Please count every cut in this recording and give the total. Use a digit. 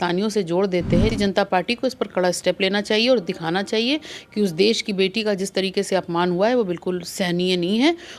1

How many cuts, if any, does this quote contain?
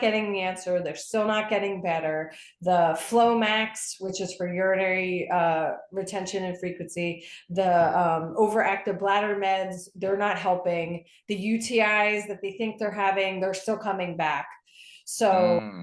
0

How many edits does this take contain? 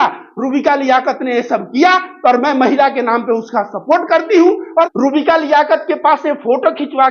1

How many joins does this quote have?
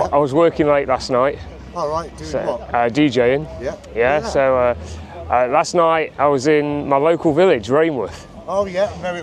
0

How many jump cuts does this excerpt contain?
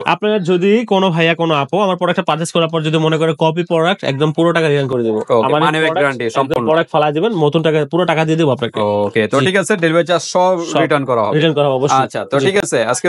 0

